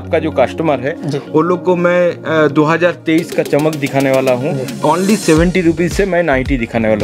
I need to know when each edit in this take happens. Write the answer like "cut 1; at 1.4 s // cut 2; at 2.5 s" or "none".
cut 1; at 4.7 s